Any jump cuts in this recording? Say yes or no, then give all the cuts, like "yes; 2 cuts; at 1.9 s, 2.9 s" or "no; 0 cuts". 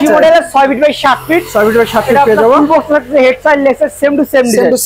no; 0 cuts